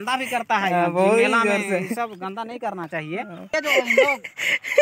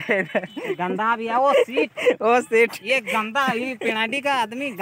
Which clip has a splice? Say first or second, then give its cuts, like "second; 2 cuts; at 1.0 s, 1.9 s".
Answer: first; 2 cuts; at 1.3 s, 3.5 s